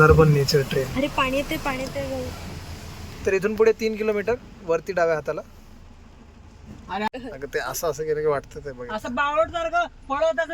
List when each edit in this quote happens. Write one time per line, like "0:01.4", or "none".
0:07.1